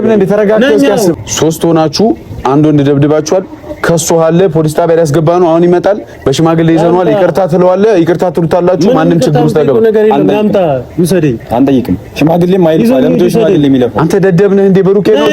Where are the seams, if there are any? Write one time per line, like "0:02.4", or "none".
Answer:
0:01.1